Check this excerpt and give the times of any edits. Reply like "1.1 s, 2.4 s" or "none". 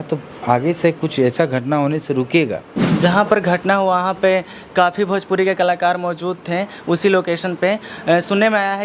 2.7 s